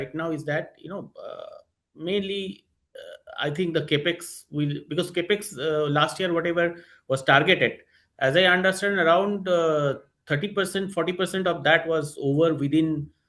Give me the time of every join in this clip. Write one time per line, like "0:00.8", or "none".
none